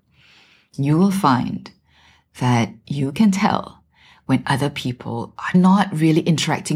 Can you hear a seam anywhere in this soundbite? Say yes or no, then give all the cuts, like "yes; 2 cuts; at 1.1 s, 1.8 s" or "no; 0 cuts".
yes; 1 cut; at 5.5 s